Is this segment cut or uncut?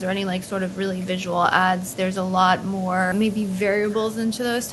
cut